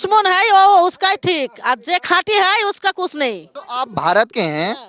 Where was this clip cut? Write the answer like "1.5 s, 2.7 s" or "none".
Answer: 3.5 s